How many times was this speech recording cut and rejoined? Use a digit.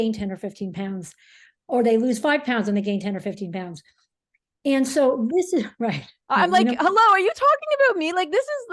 0